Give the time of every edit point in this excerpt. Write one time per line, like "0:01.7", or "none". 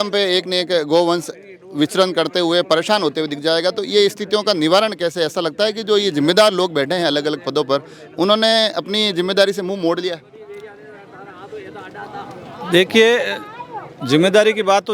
none